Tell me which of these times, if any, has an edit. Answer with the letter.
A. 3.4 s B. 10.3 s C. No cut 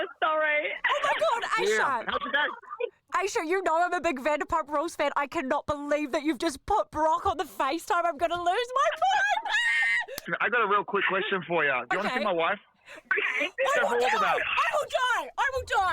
B